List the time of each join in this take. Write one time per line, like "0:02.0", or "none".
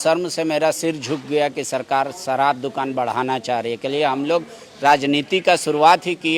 none

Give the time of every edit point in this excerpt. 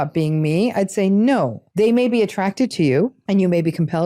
0:01.6
0:03.2

